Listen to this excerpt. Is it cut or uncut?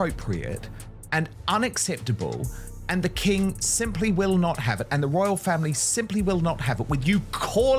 uncut